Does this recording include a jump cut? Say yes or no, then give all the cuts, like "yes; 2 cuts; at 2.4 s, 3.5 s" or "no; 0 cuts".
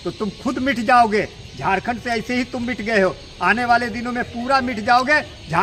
no; 0 cuts